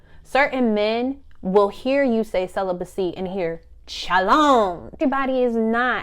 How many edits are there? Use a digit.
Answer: 1